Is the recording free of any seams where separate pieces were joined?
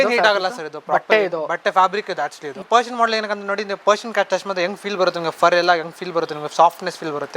no; 1 cut; at 2.6 s

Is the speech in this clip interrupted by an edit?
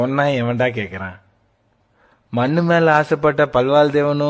no; 0 cuts

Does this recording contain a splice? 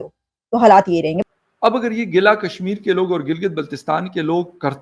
yes; 1 cut; at 1.2 s

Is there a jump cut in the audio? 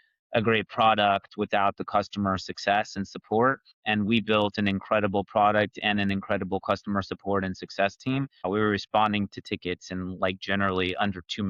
no; 0 cuts

